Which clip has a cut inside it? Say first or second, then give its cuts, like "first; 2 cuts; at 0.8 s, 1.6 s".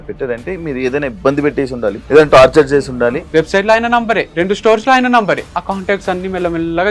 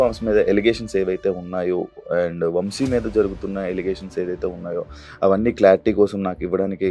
first; 4 cuts; at 2.0 s, 3.2 s, 4.3 s, 5.5 s